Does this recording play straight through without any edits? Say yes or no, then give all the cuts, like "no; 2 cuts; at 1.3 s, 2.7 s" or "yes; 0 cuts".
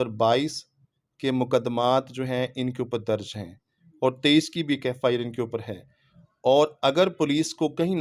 yes; 0 cuts